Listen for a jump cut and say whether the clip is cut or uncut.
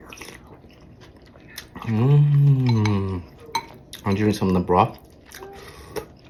uncut